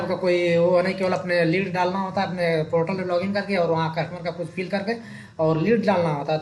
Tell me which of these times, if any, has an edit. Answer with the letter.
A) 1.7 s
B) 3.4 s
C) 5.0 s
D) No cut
D